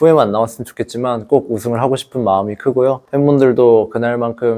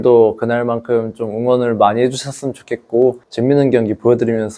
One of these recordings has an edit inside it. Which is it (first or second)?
second